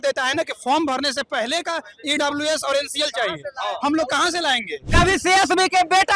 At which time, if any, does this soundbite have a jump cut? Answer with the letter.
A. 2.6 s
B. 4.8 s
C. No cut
B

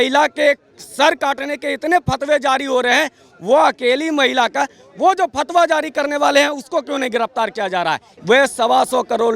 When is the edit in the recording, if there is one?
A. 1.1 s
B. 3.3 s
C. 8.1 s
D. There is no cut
C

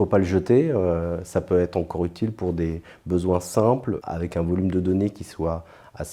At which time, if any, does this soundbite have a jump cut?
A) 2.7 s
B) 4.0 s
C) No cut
B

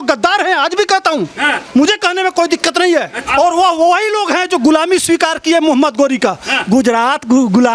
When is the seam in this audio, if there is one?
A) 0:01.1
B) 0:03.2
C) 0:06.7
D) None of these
B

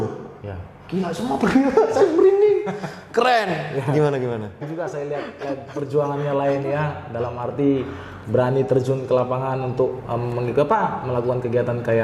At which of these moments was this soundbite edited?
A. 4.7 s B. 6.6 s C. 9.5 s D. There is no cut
A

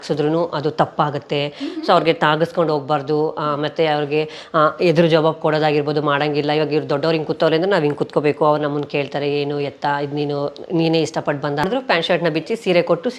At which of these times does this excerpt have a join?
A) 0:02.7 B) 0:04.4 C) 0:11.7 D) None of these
C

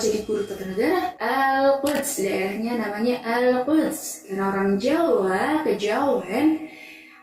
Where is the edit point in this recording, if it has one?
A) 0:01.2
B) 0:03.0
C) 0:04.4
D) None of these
A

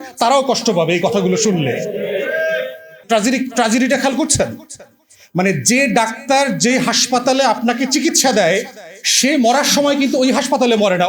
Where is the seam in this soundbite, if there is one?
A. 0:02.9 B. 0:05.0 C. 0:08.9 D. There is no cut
A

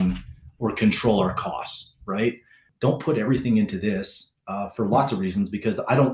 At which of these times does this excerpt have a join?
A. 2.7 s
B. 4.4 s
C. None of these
A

